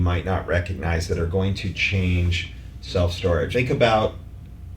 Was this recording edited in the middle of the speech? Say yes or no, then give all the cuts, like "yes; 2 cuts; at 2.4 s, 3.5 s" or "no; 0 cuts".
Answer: yes; 1 cut; at 3.5 s